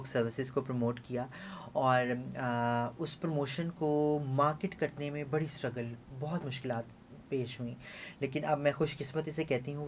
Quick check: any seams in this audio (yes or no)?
no